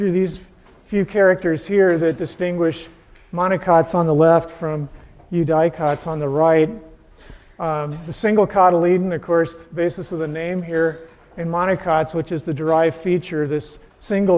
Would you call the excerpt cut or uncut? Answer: cut